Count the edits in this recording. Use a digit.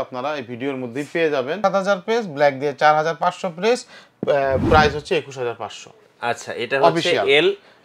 1